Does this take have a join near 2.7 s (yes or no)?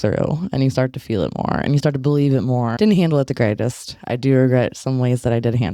yes